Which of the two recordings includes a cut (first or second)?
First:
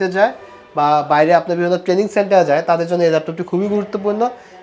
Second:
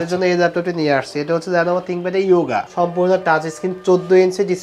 second